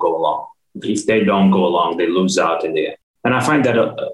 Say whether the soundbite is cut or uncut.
cut